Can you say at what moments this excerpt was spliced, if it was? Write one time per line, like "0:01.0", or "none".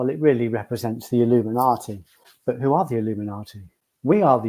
none